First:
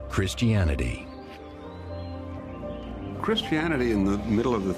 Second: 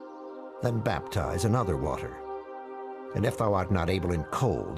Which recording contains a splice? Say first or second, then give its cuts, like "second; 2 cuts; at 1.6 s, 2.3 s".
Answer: second; 1 cut; at 2.5 s